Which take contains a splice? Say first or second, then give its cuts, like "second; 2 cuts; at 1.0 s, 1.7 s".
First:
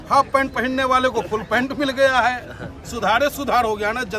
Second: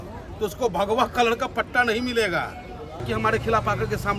second; 1 cut; at 3.0 s